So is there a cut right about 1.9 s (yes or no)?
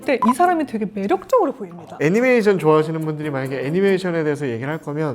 yes